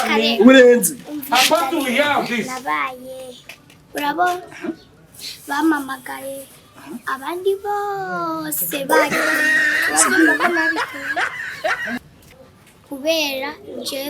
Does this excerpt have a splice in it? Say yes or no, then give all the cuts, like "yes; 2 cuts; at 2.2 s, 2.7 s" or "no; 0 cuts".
yes; 1 cut; at 12.2 s